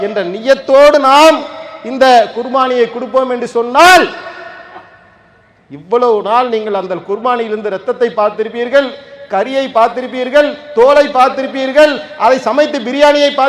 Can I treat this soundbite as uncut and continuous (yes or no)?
yes